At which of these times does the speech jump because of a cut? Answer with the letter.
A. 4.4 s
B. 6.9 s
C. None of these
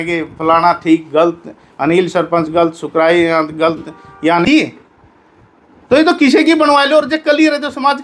A